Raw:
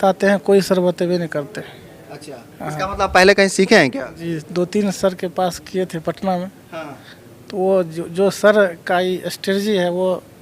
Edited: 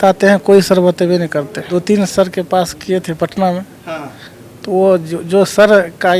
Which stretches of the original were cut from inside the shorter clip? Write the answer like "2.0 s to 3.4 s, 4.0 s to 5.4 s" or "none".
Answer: 1.6 s to 4.5 s